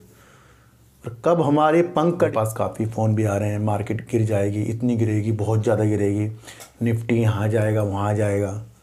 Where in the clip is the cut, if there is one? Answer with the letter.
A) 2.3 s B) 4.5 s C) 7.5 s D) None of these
A